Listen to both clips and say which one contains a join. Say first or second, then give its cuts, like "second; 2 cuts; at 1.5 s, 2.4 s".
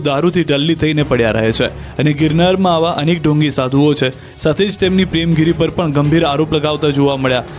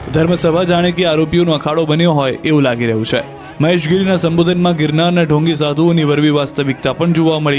first; 1 cut; at 4.7 s